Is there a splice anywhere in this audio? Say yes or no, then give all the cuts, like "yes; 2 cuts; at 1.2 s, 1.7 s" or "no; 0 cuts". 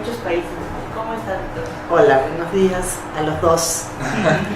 yes; 1 cut; at 3.3 s